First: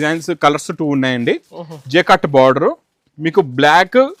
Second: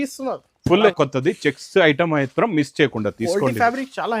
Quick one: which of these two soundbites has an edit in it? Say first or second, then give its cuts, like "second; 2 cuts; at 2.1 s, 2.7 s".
second; 1 cut; at 0.9 s